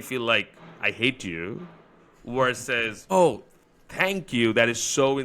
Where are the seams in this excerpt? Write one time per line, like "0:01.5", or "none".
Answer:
0:03.0